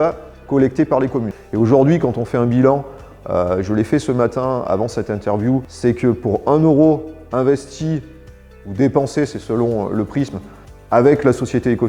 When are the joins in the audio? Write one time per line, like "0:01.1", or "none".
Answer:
0:01.4
0:05.7

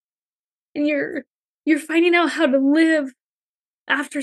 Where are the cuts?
0:01.4

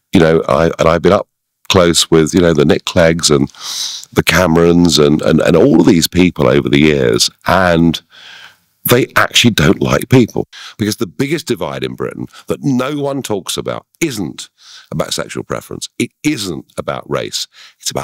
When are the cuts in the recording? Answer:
0:10.5

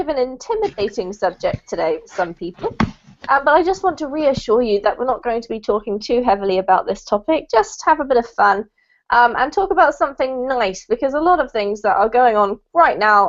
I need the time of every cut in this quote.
none

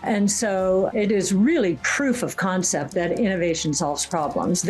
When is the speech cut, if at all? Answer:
0:00.9

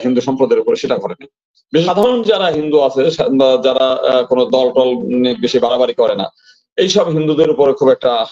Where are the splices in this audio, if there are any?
0:01.9

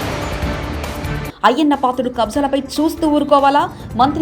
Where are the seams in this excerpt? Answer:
none

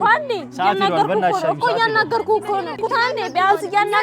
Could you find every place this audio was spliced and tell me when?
0:02.8

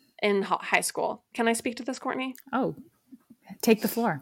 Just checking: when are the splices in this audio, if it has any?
none

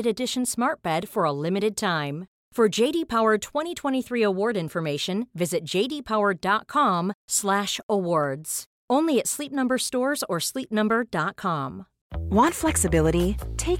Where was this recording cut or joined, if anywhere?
0:12.1

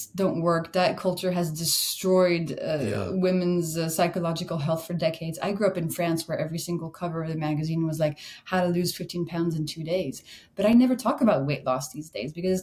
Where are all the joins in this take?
none

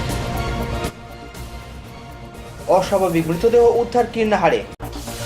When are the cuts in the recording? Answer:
none

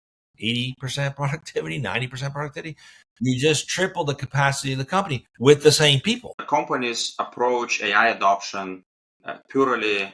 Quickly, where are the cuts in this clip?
0:06.4

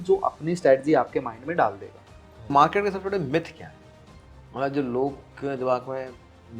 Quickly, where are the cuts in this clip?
0:02.5

